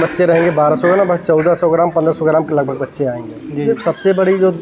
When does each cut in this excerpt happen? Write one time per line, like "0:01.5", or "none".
0:03.6